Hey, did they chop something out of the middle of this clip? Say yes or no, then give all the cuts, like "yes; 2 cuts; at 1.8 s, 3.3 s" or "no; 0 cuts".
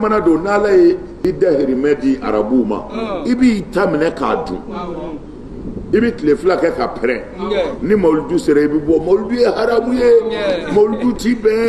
yes; 1 cut; at 1.1 s